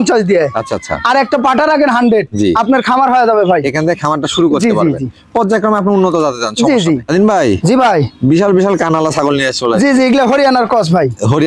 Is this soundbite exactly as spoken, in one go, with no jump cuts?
yes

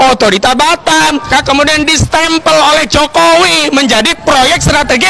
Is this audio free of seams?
no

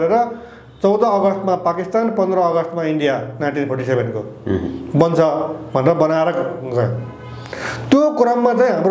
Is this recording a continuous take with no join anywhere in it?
yes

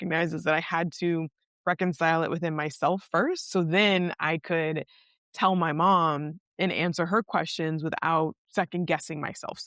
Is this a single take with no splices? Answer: yes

